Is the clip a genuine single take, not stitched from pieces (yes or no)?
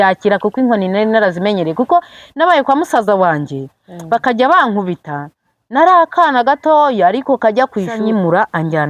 no